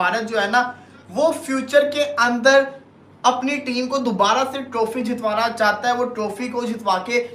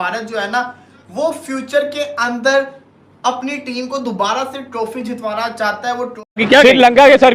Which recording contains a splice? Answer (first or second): second